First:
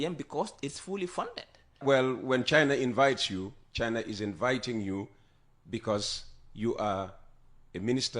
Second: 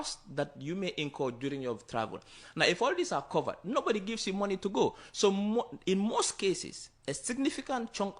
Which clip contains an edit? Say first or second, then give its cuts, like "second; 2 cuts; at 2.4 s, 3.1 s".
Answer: first; 1 cut; at 1.8 s